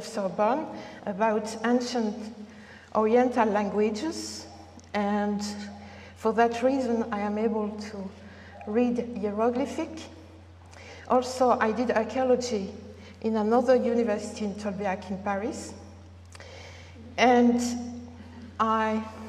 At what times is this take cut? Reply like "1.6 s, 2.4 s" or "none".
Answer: 2.1 s